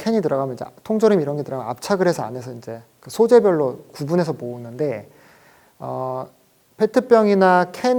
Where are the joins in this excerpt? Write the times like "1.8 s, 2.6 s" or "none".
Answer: none